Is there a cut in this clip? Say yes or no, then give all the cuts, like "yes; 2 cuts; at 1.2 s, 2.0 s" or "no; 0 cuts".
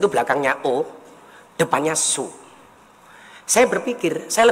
no; 0 cuts